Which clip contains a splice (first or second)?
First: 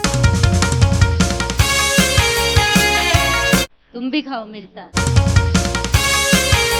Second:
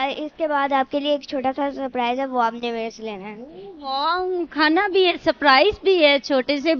first